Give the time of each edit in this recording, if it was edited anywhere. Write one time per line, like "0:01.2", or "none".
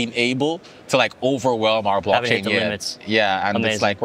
none